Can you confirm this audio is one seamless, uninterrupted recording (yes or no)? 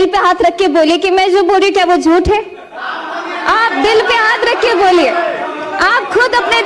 yes